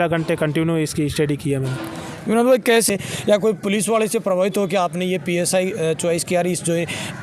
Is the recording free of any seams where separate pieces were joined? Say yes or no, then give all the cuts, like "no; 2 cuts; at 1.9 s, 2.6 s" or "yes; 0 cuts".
no; 1 cut; at 2.9 s